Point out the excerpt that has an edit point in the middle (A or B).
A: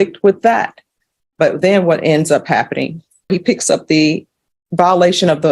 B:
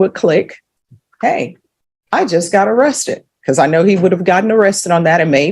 A